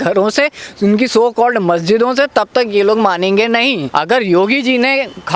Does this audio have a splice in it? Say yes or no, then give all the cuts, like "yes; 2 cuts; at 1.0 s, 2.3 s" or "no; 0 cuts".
yes; 1 cut; at 3.8 s